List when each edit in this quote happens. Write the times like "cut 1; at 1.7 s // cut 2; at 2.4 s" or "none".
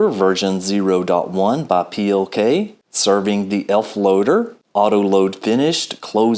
cut 1; at 2.8 s // cut 2; at 4.6 s